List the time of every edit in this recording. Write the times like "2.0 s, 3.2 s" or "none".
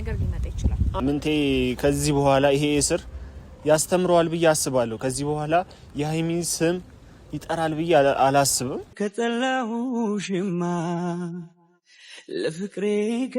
0.9 s, 8.9 s